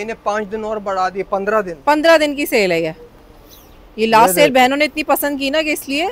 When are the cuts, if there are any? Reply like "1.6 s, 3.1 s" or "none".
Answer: none